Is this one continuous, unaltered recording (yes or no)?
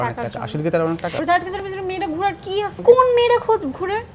no